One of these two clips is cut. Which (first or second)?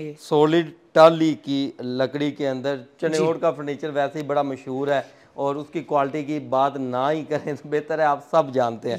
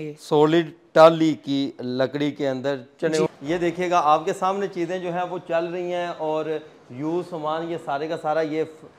second